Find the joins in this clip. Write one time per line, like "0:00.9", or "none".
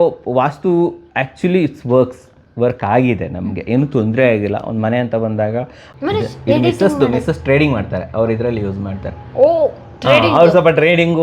0:05.8

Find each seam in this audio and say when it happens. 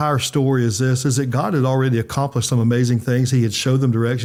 none

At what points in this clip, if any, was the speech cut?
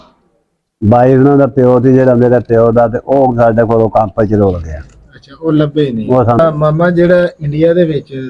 0:06.4

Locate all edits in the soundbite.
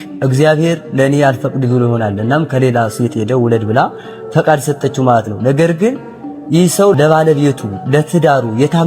0:07.0

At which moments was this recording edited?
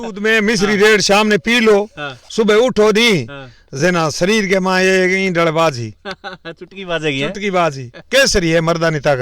0:07.9

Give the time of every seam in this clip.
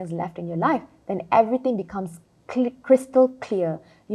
none

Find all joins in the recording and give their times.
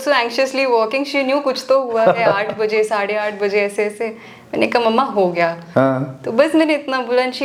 none

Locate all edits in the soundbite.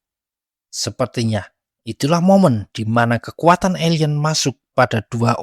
none

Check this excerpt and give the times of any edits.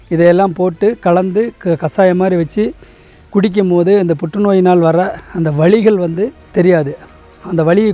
0:06.5

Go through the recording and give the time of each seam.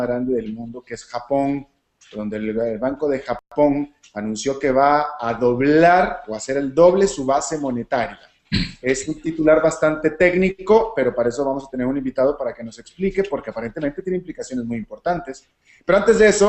0:10.4

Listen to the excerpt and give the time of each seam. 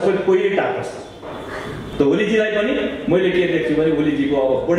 0:01.8

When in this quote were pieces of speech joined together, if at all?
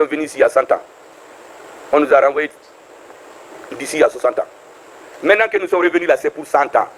none

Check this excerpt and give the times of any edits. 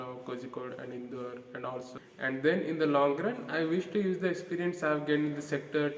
0:01.9

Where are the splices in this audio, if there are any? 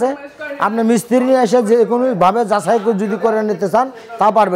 none

